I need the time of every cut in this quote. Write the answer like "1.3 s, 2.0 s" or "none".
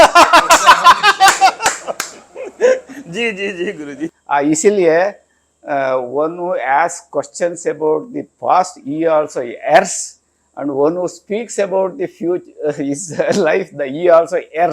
4.1 s